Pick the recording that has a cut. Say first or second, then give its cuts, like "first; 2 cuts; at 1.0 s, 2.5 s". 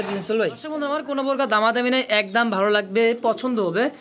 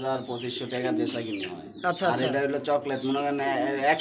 first; 1 cut; at 1.1 s